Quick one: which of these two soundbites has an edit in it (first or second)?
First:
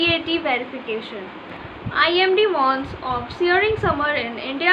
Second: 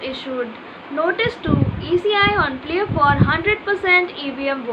first